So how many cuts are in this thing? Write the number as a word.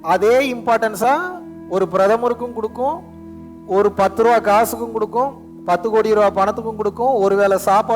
one